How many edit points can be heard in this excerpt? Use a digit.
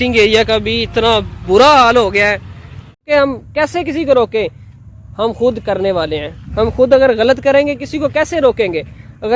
1